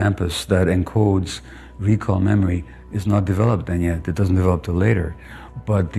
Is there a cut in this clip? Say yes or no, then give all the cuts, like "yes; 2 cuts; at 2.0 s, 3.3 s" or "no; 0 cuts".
no; 0 cuts